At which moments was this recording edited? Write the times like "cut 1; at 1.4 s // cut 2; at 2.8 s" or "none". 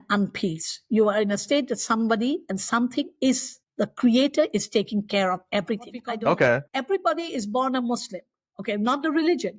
cut 1; at 6.0 s